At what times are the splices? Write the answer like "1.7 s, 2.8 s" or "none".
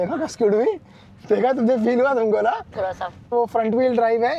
none